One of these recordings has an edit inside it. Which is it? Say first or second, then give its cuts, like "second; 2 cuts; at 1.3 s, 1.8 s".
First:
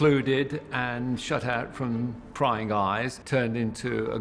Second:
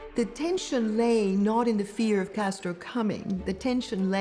first; 1 cut; at 3.2 s